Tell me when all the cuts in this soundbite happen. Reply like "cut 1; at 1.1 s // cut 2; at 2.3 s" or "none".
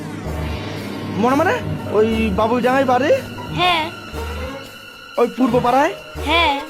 cut 1; at 1.8 s